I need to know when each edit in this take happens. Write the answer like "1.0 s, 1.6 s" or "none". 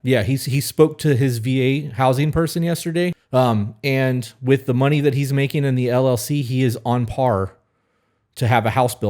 3.2 s